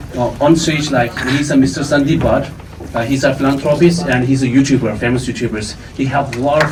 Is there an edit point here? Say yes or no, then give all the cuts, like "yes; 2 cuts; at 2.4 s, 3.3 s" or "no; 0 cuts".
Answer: no; 0 cuts